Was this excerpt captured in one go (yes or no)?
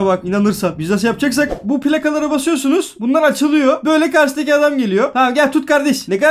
no